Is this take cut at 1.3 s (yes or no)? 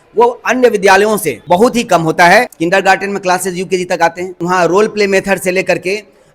yes